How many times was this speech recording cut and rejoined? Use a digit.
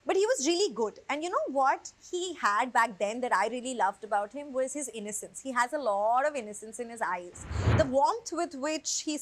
1